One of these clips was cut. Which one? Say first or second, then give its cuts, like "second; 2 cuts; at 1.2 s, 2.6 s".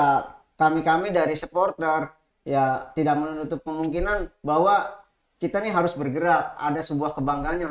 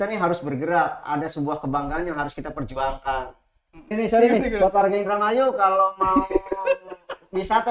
second; 1 cut; at 3.9 s